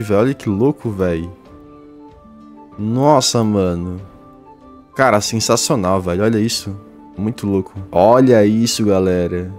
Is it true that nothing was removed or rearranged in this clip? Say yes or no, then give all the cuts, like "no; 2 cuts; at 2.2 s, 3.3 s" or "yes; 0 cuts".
no; 1 cut; at 7.8 s